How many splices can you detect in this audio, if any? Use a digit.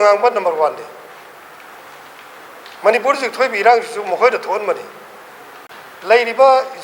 1